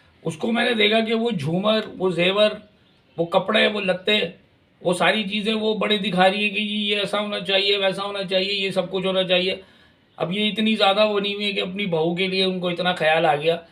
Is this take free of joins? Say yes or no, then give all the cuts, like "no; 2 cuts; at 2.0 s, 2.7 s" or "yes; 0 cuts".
yes; 0 cuts